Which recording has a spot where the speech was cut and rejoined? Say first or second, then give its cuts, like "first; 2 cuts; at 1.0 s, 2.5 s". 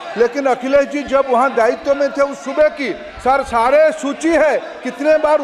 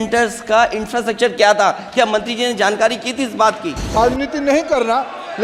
second; 1 cut; at 4.0 s